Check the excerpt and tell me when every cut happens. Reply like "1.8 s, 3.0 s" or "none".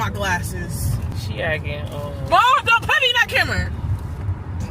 1.1 s